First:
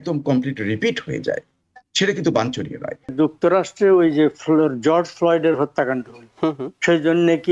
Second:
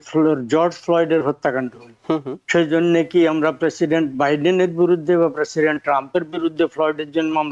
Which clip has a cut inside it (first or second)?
first